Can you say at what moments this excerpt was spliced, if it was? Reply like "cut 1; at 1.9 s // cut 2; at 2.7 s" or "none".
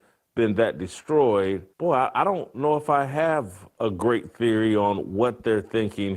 cut 1; at 1.7 s